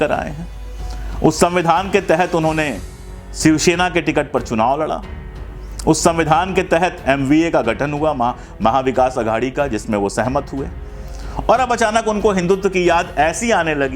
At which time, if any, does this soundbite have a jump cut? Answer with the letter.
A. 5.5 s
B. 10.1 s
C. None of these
C